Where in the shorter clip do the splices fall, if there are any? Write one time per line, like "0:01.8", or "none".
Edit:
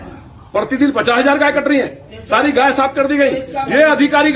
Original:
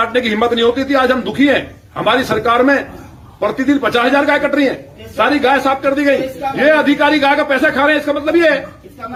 none